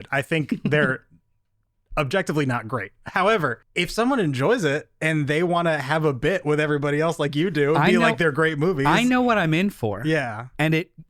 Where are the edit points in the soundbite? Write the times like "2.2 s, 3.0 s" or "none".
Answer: 3.6 s